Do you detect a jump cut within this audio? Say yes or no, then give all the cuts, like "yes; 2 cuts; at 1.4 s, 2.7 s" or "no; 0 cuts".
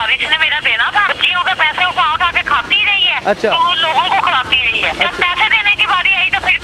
yes; 3 cuts; at 1.1 s, 3.1 s, 5.0 s